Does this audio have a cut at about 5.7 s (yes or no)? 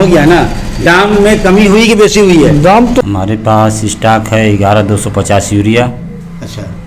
no